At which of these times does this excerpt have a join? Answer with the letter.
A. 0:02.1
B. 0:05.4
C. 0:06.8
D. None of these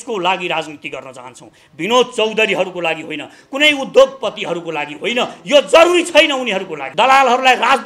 C